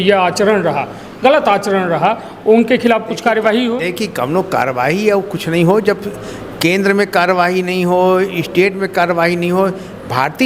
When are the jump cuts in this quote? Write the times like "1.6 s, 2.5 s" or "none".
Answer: none